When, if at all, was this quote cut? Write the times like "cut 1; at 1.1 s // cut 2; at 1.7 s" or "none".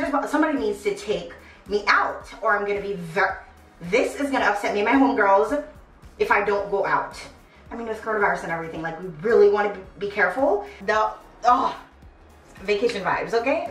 cut 1; at 10.7 s